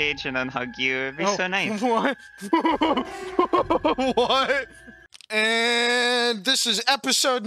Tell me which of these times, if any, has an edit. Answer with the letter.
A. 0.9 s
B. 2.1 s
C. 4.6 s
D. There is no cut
C